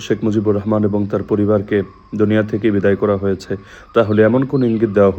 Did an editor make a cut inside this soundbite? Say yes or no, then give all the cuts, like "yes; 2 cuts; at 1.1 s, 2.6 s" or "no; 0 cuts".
no; 0 cuts